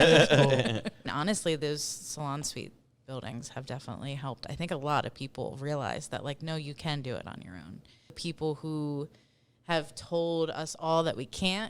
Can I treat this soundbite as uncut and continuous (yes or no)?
no